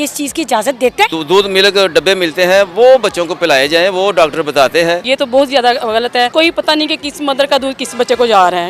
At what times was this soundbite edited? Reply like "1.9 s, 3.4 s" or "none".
1.2 s, 5.1 s, 6.3 s